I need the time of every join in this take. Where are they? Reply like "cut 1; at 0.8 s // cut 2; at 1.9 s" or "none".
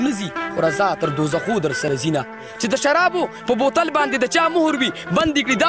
cut 1; at 1.9 s